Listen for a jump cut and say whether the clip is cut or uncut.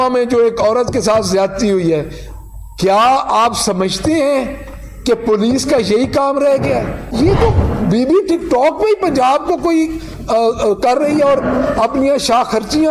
cut